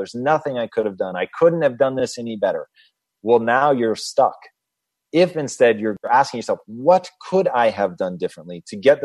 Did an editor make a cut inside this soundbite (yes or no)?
yes